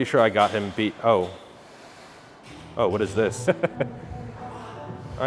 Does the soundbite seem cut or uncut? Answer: cut